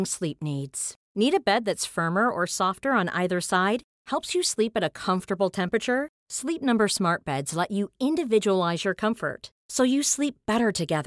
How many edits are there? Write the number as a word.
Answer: zero